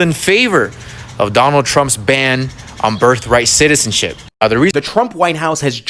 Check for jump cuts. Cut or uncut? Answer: cut